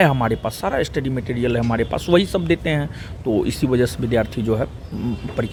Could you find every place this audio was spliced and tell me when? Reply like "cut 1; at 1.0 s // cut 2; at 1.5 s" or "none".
none